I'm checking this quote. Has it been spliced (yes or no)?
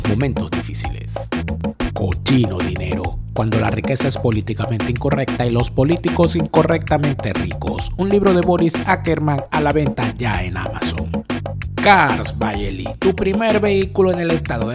yes